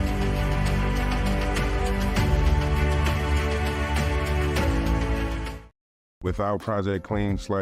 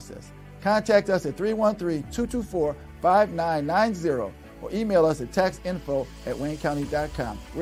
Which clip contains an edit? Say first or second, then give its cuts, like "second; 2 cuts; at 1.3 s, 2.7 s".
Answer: first; 1 cut; at 6.3 s